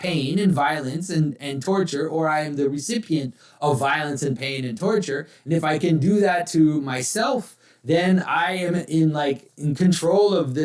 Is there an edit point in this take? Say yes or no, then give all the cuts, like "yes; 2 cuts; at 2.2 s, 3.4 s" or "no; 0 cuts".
no; 0 cuts